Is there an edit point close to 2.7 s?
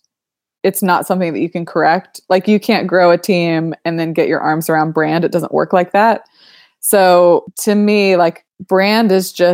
no; 2 cuts; at 7.5 s, 8.5 s

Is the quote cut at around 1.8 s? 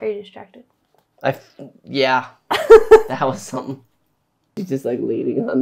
no; 1 cut; at 4.6 s

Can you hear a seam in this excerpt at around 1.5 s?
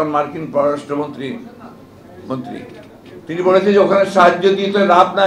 no; 0 cuts

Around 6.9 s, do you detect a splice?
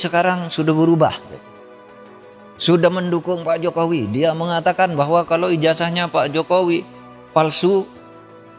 no; 0 cuts

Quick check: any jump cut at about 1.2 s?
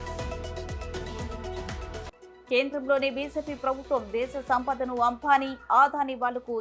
yes; 1 cut; at 1.2 s

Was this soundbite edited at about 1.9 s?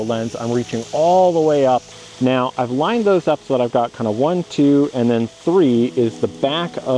yes; 1 cut; at 1.9 s

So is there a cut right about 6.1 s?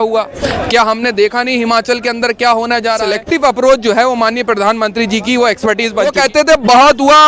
yes; 2 cuts; at 3.1 s, 6.1 s

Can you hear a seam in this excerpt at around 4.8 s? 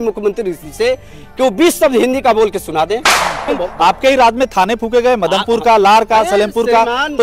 no; 1 cut; at 3.5 s

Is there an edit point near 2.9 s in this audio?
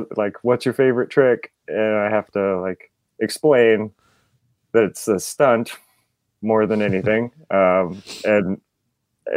no; 0 cuts

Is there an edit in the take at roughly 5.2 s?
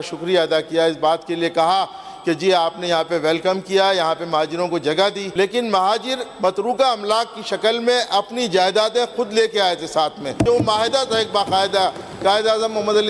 yes; 2 cuts; at 5.2 s, 10.4 s

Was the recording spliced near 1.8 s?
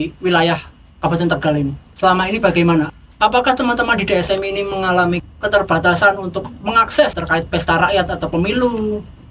yes; 4 cuts; at 1.8 s, 2.9 s, 5.3 s, 7.2 s

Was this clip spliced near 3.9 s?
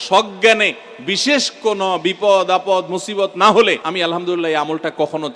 yes; 1 cut; at 3.9 s

